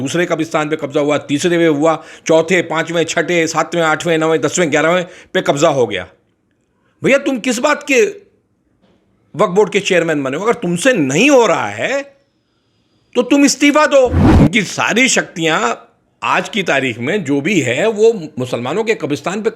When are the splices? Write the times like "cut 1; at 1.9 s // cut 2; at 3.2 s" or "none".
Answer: cut 1; at 14.2 s